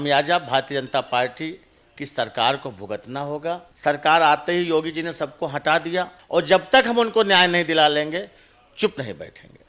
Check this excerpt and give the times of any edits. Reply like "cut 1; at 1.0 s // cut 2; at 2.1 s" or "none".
cut 1; at 3.7 s // cut 2; at 6.2 s